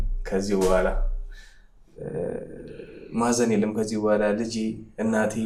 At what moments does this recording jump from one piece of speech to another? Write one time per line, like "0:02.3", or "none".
none

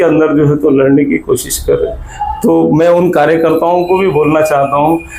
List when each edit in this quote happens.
none

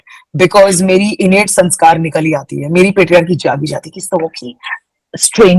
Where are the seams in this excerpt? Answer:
none

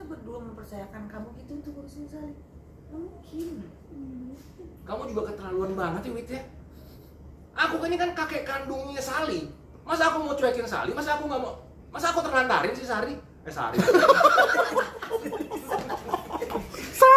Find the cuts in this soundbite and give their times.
none

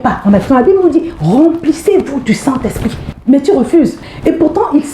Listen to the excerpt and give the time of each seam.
0:03.1

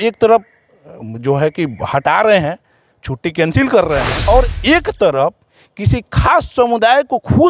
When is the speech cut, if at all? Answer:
0:04.1

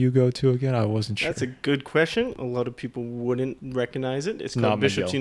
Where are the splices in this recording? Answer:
0:02.4
0:03.6

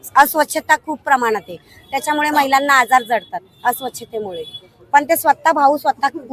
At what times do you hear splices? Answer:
none

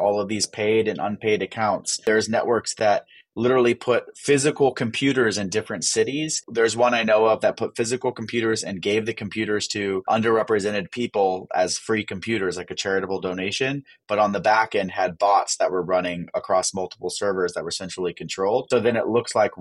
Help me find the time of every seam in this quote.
0:02.0
0:06.4
0:10.1
0:18.6

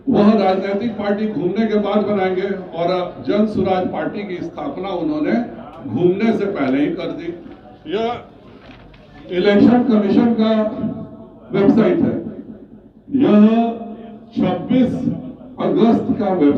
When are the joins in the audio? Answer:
none

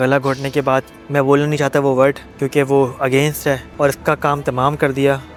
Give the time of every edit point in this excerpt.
none

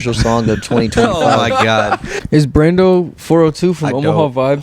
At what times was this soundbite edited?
0:02.1

